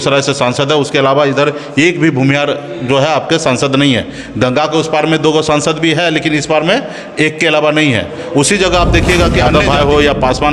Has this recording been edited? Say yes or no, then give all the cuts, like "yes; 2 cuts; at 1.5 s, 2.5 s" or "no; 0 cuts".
yes; 1 cut; at 9.5 s